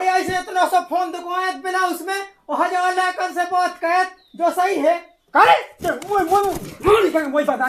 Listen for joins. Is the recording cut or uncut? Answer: uncut